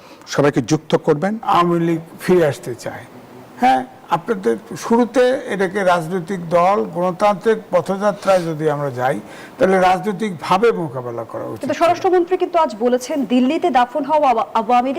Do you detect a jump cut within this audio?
yes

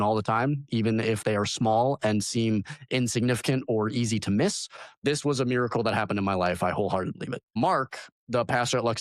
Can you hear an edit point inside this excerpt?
yes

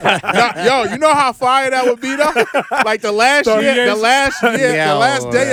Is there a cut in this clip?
no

